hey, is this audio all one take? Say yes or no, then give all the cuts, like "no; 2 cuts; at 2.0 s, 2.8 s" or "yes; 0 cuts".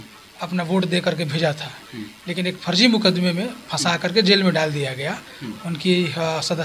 yes; 0 cuts